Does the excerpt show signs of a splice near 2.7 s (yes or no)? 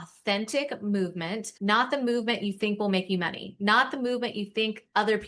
no